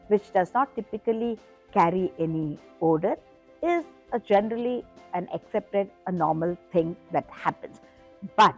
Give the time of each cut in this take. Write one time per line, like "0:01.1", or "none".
none